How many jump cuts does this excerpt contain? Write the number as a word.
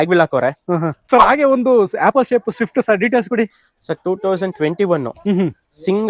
one